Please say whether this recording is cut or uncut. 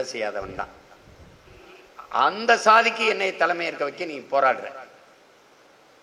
cut